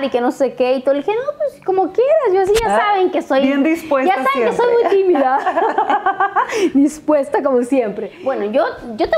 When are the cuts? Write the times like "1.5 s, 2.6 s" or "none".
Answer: 8.1 s